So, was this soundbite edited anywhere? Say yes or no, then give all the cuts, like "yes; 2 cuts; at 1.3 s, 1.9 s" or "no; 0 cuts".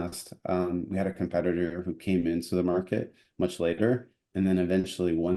no; 0 cuts